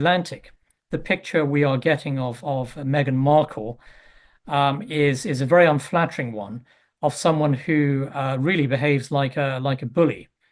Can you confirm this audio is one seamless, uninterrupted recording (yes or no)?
yes